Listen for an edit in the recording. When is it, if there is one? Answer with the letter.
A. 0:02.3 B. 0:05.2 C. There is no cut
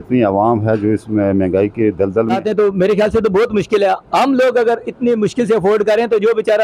A